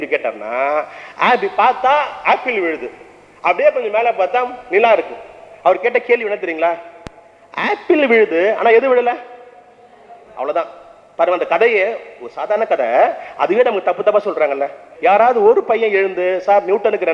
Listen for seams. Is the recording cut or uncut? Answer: cut